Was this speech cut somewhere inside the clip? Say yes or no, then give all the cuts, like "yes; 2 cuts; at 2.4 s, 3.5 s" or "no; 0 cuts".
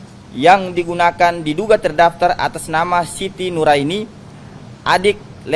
no; 0 cuts